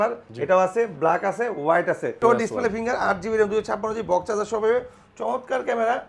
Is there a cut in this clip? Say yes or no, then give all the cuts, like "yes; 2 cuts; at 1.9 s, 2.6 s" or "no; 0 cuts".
yes; 1 cut; at 2.2 s